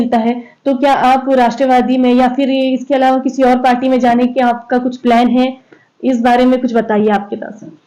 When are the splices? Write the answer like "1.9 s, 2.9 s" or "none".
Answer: none